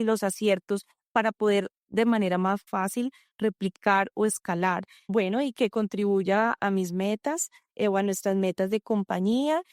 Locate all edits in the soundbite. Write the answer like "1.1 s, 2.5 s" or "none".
2.7 s, 4.9 s, 6.6 s

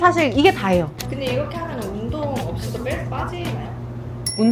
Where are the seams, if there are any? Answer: 0.9 s

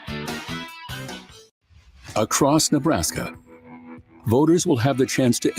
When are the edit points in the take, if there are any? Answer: 1.4 s

